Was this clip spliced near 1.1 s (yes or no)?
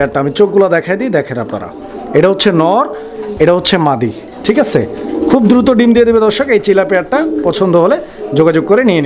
no